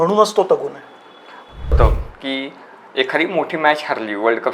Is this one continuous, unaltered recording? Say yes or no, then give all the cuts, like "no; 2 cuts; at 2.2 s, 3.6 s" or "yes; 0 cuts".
no; 1 cut; at 1.8 s